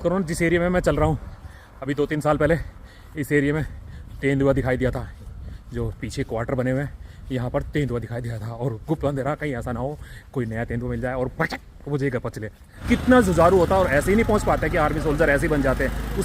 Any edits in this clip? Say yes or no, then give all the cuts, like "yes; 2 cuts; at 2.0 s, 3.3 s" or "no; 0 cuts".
yes; 1 cut; at 12.7 s